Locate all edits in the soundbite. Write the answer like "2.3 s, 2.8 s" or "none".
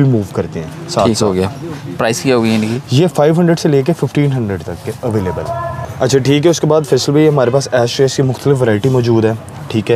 none